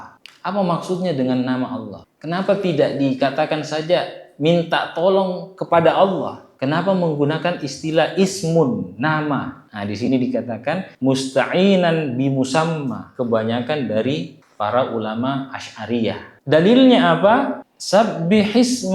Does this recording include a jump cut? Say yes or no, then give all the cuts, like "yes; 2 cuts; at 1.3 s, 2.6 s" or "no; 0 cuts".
yes; 2 cuts; at 13.1 s, 17.6 s